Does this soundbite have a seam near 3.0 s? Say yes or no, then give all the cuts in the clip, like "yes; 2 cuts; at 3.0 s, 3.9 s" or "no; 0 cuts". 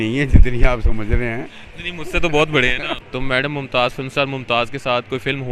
yes; 1 cut; at 3.0 s